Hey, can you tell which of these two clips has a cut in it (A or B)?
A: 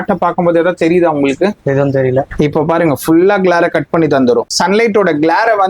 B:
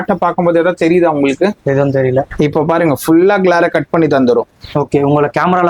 A